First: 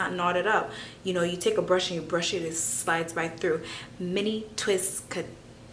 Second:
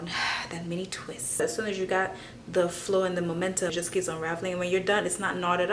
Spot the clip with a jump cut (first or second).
second